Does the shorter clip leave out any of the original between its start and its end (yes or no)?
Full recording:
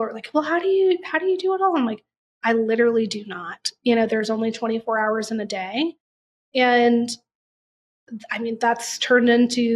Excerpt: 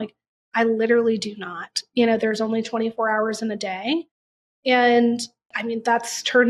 yes